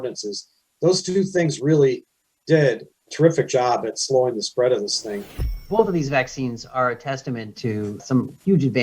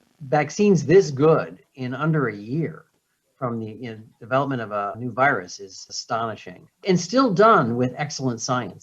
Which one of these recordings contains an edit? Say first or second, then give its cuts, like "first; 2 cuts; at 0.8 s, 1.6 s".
first; 1 cut; at 5.6 s